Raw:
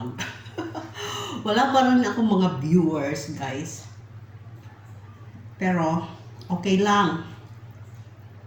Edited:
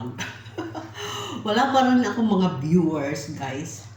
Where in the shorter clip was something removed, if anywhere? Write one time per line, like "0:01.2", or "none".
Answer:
none